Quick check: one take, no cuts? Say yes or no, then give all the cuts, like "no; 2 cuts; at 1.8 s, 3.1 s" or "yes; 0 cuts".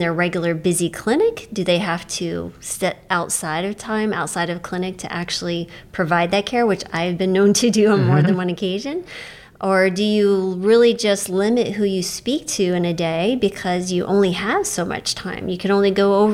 yes; 0 cuts